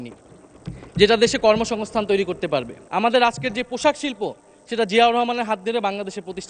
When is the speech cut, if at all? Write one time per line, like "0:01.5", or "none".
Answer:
0:02.8